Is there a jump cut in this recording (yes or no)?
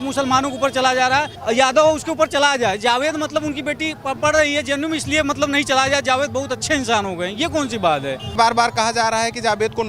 yes